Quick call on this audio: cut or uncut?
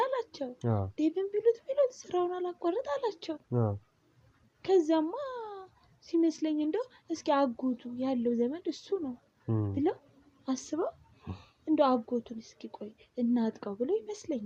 uncut